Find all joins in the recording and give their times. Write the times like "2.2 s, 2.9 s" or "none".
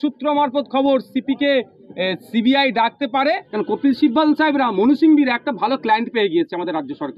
3.5 s